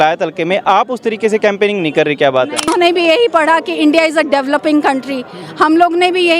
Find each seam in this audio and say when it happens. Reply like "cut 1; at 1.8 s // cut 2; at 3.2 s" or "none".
cut 1; at 2.7 s